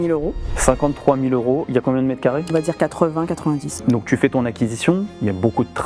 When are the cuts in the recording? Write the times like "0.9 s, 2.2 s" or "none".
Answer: 2.5 s, 3.8 s